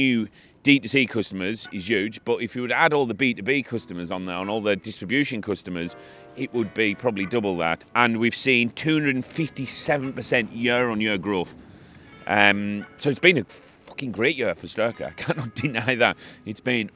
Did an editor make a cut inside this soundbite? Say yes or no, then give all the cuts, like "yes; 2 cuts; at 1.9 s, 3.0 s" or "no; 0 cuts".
yes; 1 cut; at 7.8 s